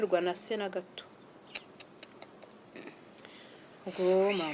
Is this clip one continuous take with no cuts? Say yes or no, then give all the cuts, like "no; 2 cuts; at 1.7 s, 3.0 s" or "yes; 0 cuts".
yes; 0 cuts